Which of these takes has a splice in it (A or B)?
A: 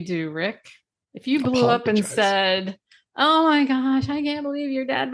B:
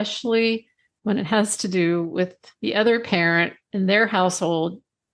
B